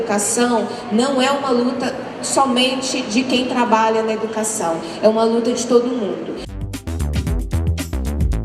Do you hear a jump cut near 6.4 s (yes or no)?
yes